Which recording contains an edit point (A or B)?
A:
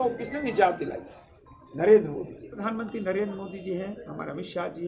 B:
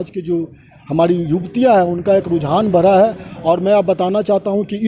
A